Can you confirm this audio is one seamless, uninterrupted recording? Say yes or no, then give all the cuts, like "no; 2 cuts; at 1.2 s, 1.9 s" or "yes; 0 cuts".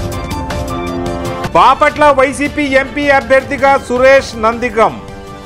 no; 1 cut; at 1.4 s